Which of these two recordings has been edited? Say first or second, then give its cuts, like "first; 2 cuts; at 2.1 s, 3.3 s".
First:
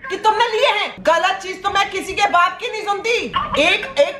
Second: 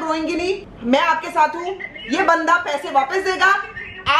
first; 2 cuts; at 0.9 s, 3.3 s